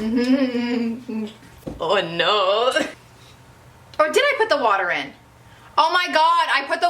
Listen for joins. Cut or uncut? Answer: cut